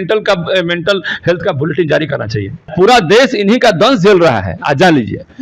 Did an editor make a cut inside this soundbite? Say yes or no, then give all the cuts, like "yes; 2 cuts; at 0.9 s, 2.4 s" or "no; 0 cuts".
yes; 1 cut; at 2.7 s